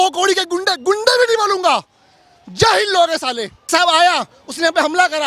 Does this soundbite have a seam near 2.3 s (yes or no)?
no